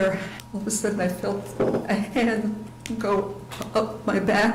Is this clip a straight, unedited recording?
yes; 0 cuts

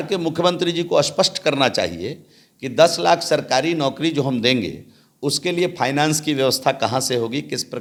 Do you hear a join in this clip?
no; 0 cuts

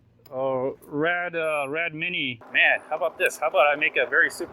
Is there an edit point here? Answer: yes; 1 cut; at 2.4 s

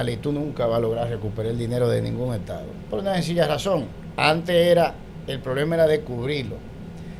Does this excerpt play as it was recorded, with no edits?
yes; 0 cuts

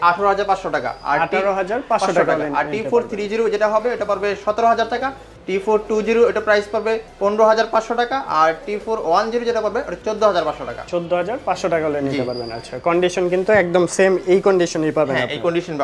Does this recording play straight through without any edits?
yes; 0 cuts

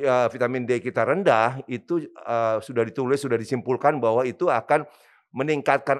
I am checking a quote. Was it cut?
no; 0 cuts

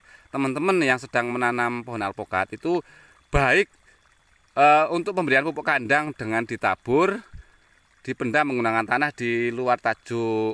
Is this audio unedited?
yes; 0 cuts

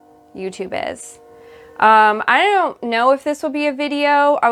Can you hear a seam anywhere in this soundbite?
no; 0 cuts

